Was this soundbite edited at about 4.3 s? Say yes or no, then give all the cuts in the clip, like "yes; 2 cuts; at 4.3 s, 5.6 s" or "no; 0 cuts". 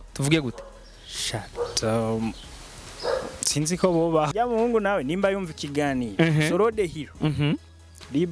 yes; 1 cut; at 4.3 s